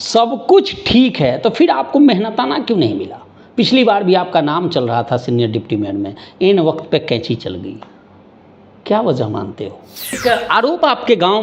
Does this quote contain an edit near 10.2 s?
yes; 1 cut; at 10.2 s

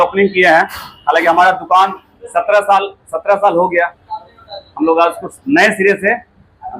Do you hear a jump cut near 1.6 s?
no; 0 cuts

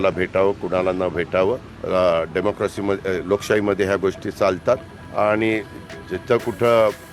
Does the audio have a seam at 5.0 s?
yes; 2 cuts; at 1.7 s, 5.0 s

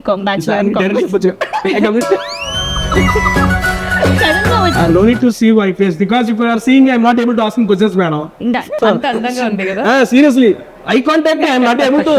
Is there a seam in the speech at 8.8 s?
yes; 2 cuts; at 4.7 s, 8.8 s

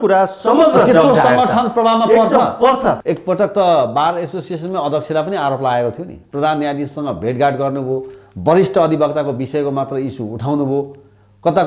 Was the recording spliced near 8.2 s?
no; 1 cut; at 3.0 s

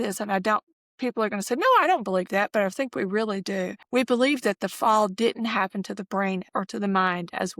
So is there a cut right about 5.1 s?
no; 2 cuts; at 3.8 s, 6.4 s

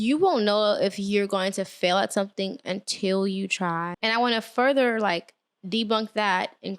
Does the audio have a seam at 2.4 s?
no; 1 cut; at 3.9 s

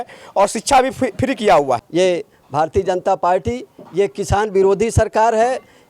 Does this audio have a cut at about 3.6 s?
no; 1 cut; at 1.8 s

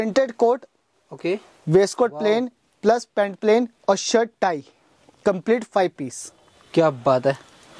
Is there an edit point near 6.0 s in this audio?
no; 0 cuts

